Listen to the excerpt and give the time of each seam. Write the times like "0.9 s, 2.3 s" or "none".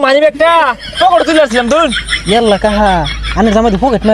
2.1 s